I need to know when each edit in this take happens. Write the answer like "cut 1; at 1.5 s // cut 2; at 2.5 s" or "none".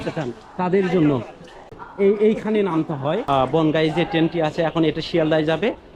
cut 1; at 1.8 s // cut 2; at 3.2 s